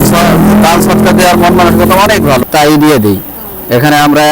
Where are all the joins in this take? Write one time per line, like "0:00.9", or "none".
0:02.4